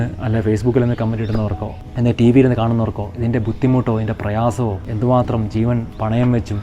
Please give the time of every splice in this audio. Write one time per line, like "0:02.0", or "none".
0:01.7
0:04.9